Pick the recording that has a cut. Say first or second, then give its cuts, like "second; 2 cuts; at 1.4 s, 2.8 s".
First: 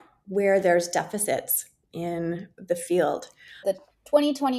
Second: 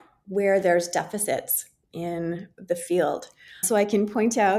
first; 1 cut; at 3.6 s